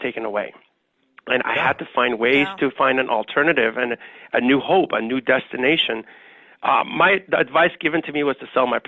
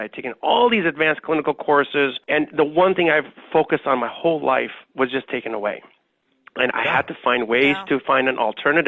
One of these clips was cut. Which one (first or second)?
second